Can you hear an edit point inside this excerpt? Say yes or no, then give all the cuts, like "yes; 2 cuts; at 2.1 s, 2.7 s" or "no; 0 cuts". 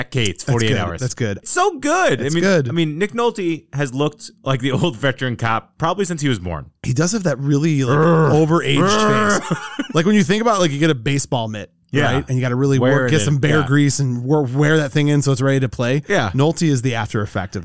yes; 1 cut; at 1.5 s